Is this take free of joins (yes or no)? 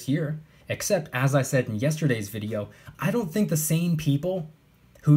yes